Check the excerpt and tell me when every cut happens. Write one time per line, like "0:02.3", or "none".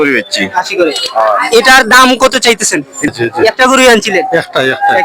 0:03.1